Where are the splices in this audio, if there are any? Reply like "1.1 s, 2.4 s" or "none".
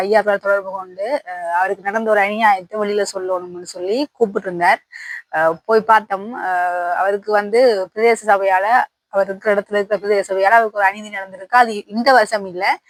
none